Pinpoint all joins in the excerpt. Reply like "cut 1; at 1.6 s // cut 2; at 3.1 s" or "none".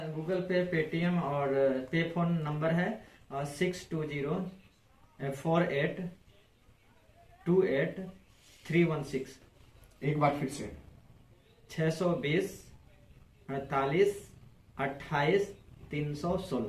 none